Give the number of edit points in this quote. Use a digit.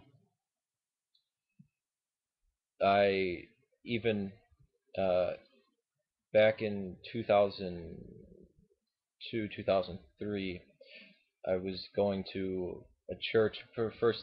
1